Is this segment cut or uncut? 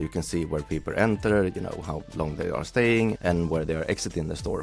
uncut